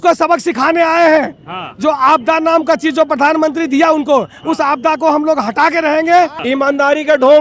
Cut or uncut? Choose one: cut